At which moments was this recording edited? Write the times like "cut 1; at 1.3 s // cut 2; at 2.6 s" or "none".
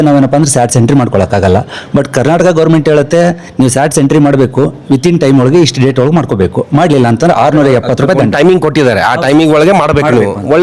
none